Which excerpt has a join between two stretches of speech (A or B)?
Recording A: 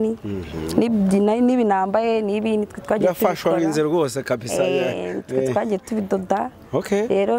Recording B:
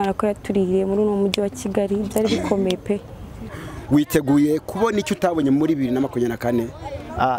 B